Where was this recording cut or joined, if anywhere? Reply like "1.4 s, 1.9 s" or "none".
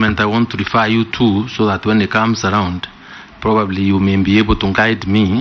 none